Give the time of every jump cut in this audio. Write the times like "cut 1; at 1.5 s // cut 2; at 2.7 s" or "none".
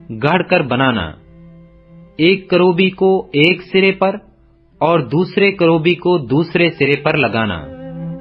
none